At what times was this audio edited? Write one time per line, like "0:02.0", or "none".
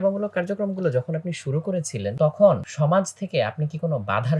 0:02.1
0:02.7